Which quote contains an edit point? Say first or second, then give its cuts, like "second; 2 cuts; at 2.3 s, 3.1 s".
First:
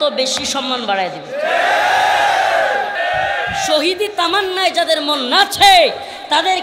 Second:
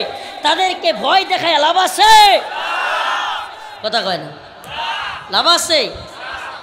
first; 1 cut; at 2.9 s